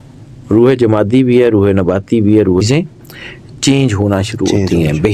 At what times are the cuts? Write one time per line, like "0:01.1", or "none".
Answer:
0:02.6